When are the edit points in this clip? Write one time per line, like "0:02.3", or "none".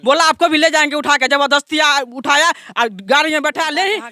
none